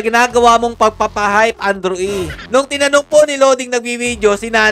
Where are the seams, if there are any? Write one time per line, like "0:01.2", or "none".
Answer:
0:02.4